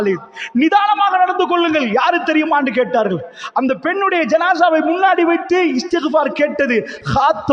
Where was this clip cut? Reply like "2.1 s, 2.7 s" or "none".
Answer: none